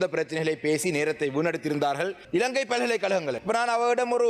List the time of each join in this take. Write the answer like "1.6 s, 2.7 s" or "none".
2.2 s, 3.4 s